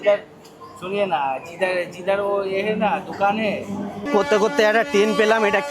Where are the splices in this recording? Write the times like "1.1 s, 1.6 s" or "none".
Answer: 4.1 s